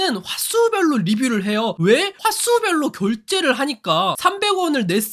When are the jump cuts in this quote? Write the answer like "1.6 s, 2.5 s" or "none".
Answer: 2.1 s